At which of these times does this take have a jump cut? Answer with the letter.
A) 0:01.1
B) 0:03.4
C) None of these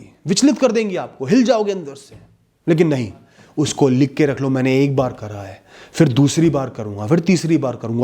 B